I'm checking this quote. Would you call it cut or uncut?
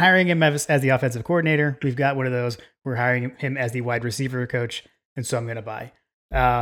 uncut